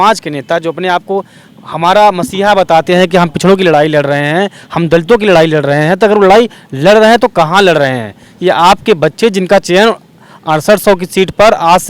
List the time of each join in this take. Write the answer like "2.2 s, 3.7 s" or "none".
none